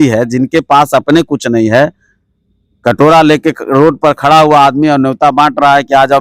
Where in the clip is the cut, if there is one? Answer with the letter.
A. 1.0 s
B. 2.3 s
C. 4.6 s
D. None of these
D